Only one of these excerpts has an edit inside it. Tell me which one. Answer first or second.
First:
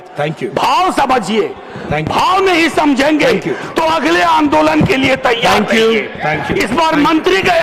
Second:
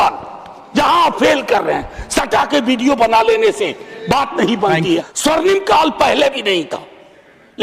second